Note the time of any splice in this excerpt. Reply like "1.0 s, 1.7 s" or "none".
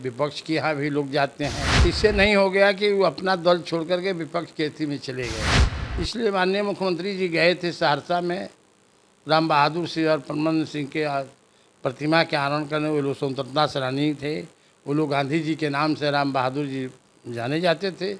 1.7 s